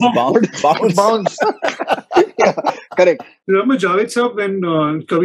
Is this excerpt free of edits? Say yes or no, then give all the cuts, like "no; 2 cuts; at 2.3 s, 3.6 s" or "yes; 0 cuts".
no; 1 cut; at 3.3 s